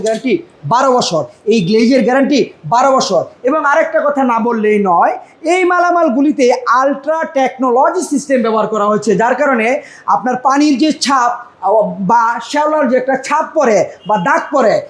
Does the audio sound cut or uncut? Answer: uncut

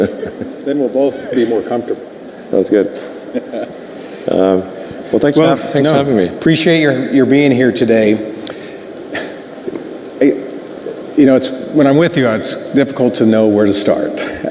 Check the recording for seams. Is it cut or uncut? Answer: uncut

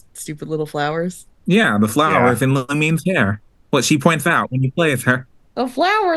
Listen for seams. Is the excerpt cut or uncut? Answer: cut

